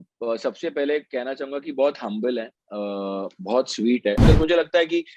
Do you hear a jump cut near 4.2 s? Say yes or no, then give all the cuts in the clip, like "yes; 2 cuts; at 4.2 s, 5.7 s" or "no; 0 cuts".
yes; 1 cut; at 4.2 s